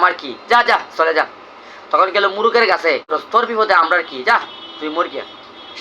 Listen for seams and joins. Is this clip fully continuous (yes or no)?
no